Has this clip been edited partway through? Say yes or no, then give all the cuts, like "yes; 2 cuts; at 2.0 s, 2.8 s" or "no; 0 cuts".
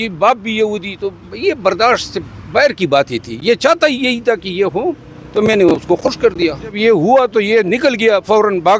yes; 1 cut; at 6.8 s